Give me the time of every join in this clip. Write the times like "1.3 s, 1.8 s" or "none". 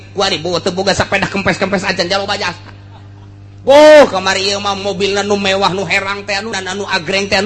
6.6 s